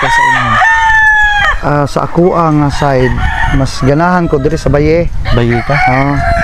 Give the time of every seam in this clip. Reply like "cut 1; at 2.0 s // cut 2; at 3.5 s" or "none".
none